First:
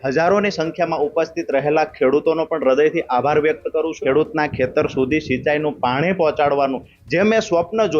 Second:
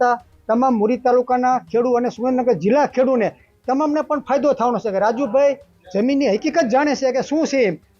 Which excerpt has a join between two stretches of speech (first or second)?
first